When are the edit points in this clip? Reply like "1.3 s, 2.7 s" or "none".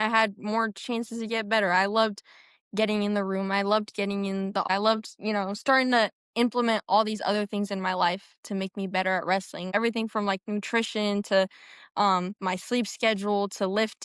4.7 s, 9.7 s